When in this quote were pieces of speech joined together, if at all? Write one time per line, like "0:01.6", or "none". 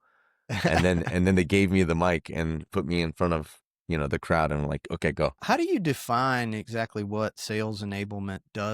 0:05.4

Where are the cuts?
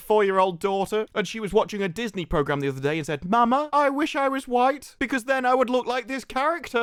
none

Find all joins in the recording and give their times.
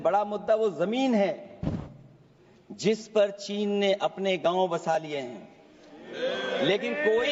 none

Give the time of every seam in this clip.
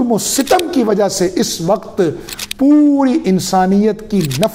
none

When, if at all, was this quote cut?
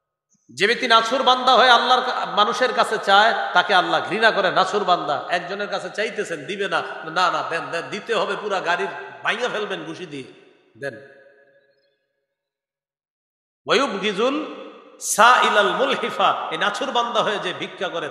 none

